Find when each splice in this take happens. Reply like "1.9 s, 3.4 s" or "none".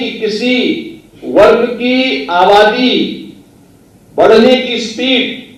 none

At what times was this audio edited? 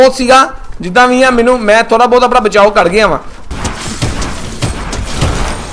3.3 s

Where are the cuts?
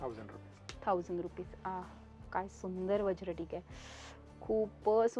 none

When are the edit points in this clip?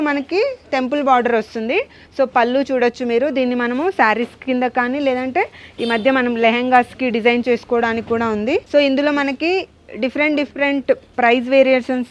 none

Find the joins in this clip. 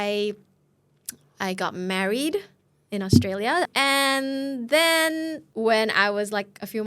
3.7 s, 5.4 s

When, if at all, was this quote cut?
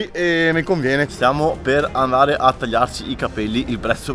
1.1 s

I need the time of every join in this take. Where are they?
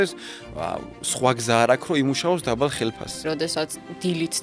3.2 s

